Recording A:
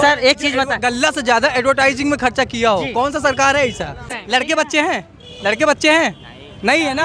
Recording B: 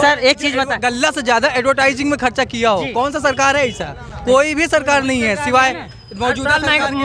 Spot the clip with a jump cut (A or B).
A